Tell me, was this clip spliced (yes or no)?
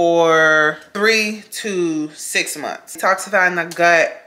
yes